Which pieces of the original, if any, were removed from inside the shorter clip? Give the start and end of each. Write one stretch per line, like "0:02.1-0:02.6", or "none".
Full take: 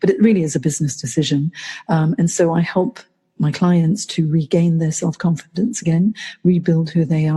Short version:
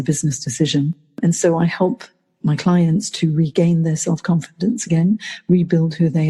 0:01.8-0:02.1